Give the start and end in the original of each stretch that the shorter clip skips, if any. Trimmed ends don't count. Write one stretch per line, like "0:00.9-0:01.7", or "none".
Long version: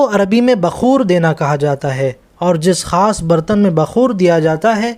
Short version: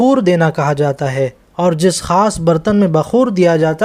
none